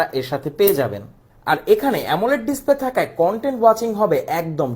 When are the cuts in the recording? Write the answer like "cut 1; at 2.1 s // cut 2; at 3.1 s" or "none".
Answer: cut 1; at 1.3 s